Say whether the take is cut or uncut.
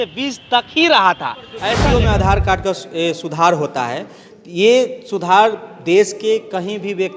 cut